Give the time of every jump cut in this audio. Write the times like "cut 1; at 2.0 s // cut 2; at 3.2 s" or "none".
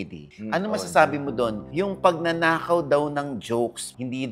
none